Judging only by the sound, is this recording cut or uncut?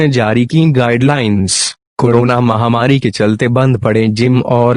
uncut